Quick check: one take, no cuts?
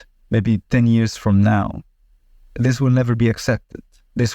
yes; 0 cuts

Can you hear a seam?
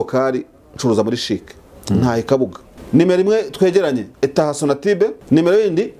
yes; 3 cuts; at 2.7 s, 4.1 s, 5.2 s

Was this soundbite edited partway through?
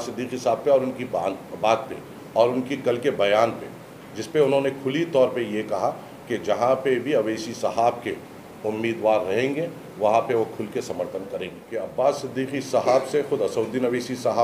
yes; 1 cut; at 11.6 s

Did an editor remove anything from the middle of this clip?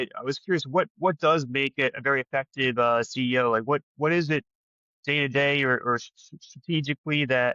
no; 0 cuts

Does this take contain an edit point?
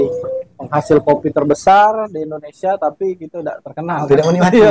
no; 0 cuts

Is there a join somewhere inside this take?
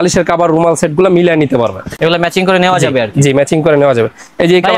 no; 0 cuts

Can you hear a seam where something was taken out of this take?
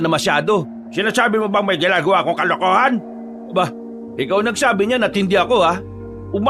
no; 0 cuts

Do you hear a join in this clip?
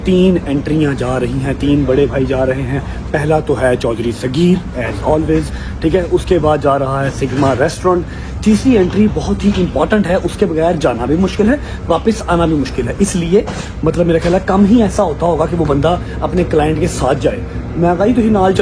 no; 0 cuts

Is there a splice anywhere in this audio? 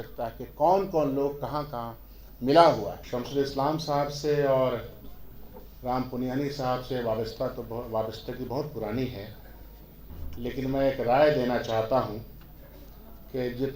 yes; 1 cut; at 3.0 s

